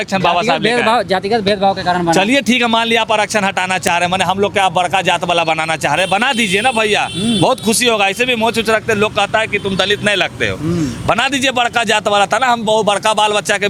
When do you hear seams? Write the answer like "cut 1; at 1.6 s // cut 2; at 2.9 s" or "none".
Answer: none